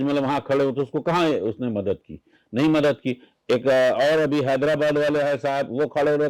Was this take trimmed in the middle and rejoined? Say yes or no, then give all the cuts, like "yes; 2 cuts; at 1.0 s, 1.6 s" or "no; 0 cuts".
no; 0 cuts